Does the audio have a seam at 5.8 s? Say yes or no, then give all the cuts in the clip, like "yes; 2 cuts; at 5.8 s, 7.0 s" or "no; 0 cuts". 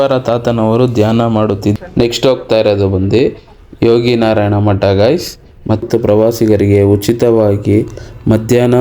yes; 2 cuts; at 1.8 s, 5.8 s